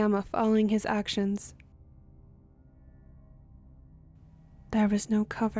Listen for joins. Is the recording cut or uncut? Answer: cut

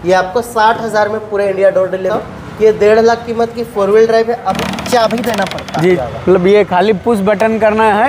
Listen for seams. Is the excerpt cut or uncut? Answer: cut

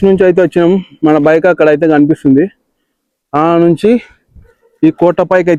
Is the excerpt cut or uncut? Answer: uncut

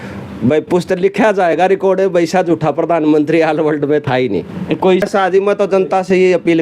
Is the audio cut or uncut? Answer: cut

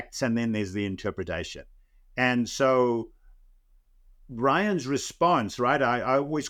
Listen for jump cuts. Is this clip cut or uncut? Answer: uncut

